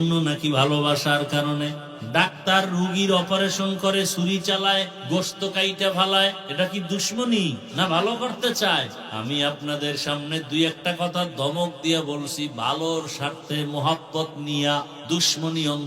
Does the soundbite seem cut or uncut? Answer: cut